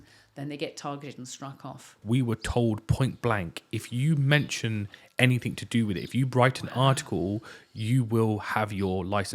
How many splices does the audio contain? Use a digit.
1